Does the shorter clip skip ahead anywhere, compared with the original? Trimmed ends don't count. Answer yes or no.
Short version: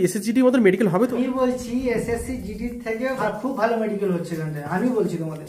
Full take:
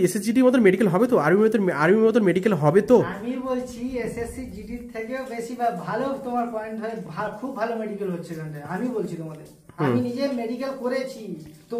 yes